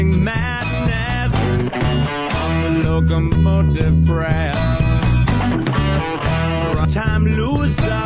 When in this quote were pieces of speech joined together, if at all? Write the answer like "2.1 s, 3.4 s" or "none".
none